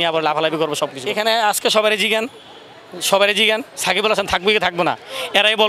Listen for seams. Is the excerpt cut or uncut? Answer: cut